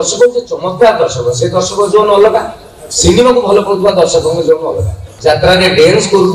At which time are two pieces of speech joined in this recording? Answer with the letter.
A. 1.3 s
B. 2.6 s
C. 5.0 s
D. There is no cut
C